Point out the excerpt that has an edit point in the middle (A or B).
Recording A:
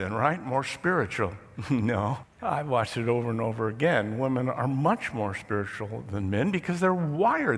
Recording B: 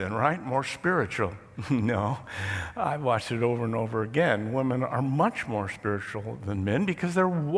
A